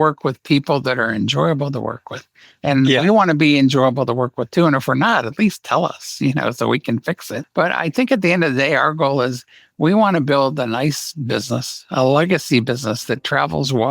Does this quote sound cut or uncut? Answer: cut